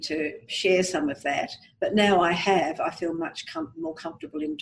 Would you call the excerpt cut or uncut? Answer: uncut